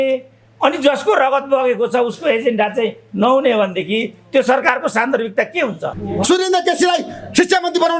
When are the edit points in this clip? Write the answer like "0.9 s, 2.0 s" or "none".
6.0 s